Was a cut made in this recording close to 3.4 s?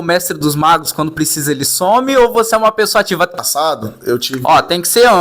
yes; 1 cut; at 3.4 s

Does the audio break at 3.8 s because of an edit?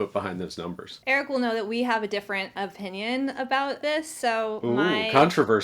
yes; 2 cuts; at 0.9 s, 3.8 s

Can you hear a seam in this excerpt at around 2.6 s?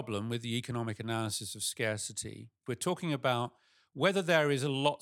yes; 1 cut; at 2.6 s

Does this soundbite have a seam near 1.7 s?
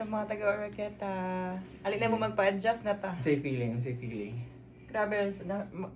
yes; 1 cut; at 1.7 s

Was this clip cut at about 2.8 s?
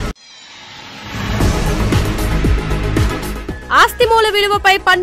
yes; 1 cut; at 2.8 s

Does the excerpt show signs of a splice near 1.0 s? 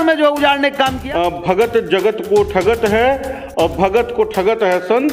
yes; 1 cut; at 1.0 s

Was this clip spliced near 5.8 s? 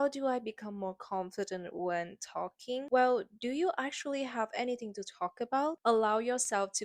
yes; 1 cut; at 5.8 s

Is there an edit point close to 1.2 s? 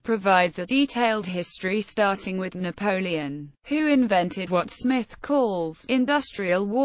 yes; 1 cut; at 1.2 s

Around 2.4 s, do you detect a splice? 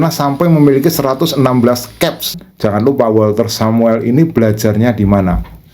yes; 1 cut; at 2.4 s

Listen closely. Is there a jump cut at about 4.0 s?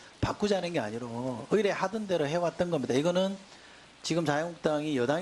no; 0 cuts

